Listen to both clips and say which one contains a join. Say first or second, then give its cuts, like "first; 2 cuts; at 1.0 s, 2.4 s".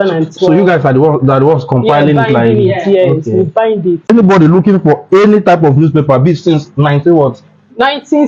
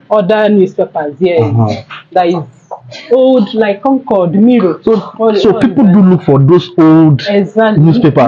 first; 1 cut; at 4.1 s